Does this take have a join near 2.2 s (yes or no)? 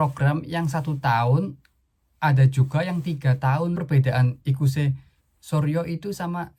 no